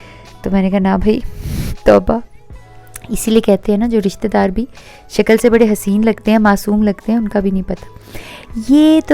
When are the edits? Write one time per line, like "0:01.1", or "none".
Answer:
none